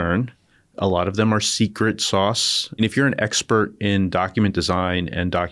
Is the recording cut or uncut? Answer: cut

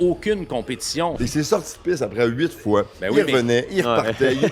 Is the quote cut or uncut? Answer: cut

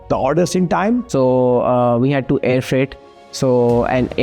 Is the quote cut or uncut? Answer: cut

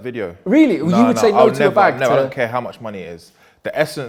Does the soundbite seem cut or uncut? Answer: uncut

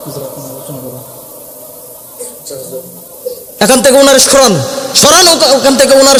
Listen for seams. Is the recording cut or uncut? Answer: uncut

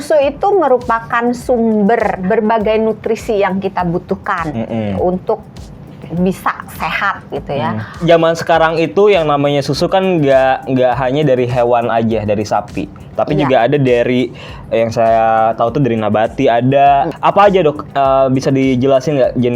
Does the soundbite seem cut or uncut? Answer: cut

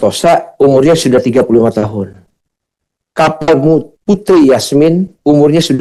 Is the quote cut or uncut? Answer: uncut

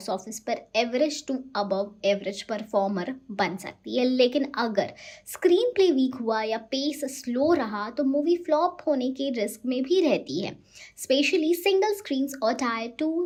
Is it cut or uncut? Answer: uncut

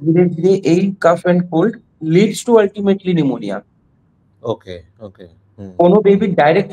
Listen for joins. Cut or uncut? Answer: uncut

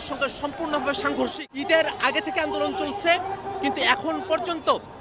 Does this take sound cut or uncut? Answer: cut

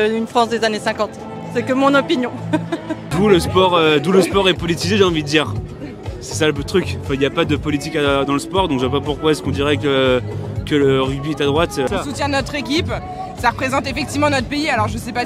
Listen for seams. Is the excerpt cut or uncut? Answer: uncut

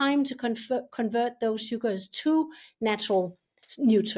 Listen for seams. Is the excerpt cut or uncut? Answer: uncut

